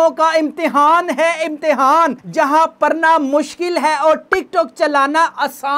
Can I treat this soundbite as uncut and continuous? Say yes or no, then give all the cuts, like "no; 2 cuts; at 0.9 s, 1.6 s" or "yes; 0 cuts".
yes; 0 cuts